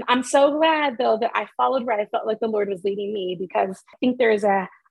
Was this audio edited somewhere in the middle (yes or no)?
yes